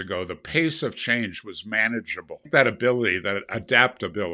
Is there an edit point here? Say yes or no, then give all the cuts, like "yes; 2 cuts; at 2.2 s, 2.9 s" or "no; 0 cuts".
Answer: yes; 1 cut; at 2.5 s